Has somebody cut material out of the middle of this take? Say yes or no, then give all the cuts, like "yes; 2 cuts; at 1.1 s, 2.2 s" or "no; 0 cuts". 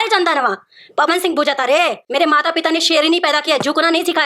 yes; 1 cut; at 2.0 s